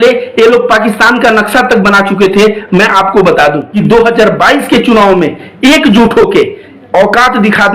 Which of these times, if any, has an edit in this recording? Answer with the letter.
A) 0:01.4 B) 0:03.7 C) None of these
B